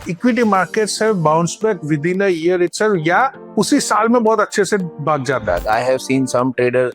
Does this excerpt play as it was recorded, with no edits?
no; 1 cut; at 5.6 s

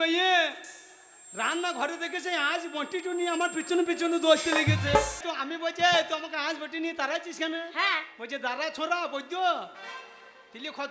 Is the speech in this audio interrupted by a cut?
yes; 1 cut; at 5.3 s

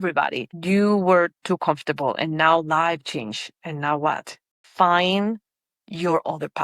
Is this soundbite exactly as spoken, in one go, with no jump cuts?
no; 1 cut; at 4.5 s

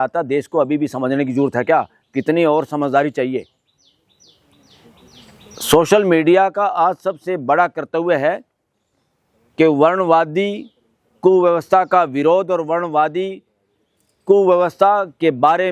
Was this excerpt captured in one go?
yes; 0 cuts

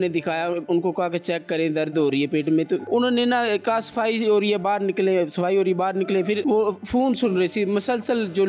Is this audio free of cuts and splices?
yes; 0 cuts

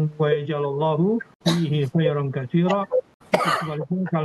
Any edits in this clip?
yes; 2 cuts; at 1.3 s, 3.2 s

